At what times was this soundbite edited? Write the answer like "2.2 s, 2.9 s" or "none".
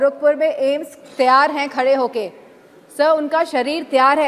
none